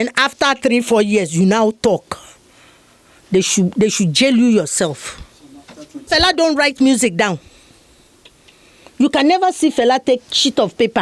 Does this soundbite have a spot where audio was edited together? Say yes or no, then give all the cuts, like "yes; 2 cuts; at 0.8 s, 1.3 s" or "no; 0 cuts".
yes; 1 cut; at 6.1 s